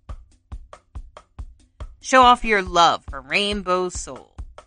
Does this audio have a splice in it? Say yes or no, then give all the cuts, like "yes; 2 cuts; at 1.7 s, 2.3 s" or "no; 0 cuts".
yes; 1 cut; at 1.3 s